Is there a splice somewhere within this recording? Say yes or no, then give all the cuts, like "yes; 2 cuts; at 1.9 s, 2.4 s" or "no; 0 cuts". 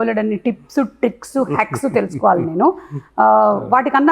no; 0 cuts